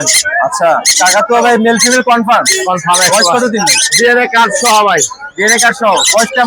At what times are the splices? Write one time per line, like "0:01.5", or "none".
none